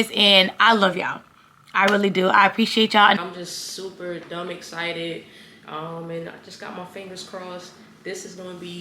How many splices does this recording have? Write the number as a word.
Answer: one